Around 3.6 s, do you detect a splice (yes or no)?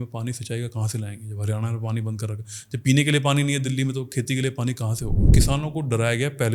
no